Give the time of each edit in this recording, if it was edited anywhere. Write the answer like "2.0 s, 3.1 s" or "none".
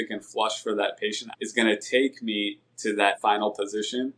1.2 s, 3.2 s